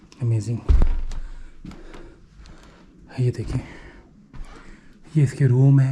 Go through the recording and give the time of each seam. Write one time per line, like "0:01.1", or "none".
none